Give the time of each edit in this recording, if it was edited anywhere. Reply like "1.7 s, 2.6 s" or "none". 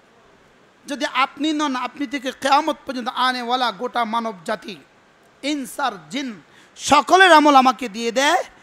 5.5 s